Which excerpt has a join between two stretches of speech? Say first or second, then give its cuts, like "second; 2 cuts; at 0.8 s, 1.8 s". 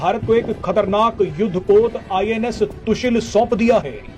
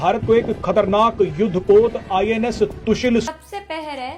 second; 1 cut; at 3.3 s